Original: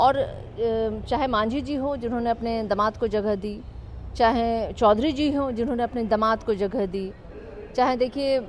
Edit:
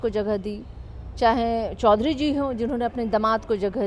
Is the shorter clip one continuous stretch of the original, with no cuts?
yes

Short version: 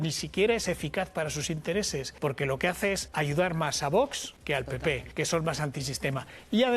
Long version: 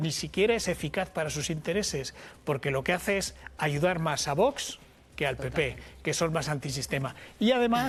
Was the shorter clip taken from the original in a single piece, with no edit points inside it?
no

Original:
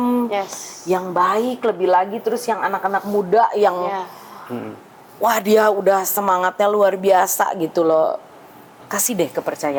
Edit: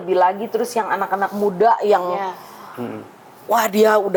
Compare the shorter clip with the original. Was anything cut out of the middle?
no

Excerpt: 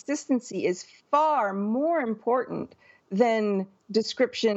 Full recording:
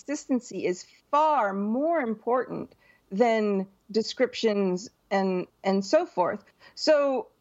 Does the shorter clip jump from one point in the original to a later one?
no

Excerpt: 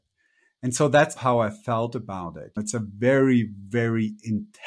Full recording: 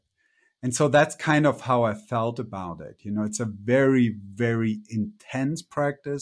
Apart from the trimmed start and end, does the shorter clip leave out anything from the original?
yes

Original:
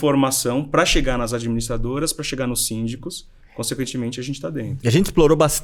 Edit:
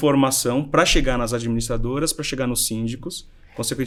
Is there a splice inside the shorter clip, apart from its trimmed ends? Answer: no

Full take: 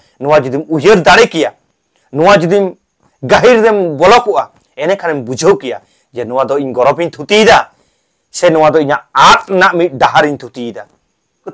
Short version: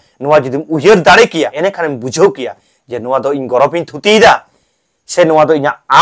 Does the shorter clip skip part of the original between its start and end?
yes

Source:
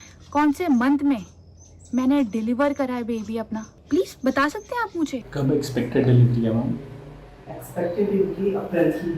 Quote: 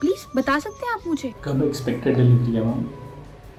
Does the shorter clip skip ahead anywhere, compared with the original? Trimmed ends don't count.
no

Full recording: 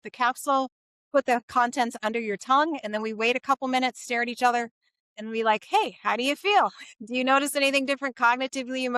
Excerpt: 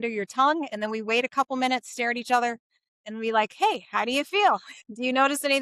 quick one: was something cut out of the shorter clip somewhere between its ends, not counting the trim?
no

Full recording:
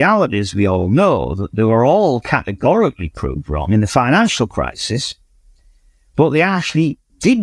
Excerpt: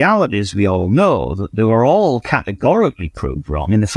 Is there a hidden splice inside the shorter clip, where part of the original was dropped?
no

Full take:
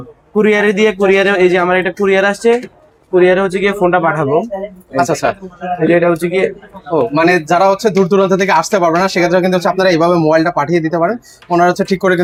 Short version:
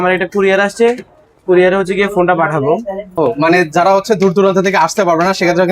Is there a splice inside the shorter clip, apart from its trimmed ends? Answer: yes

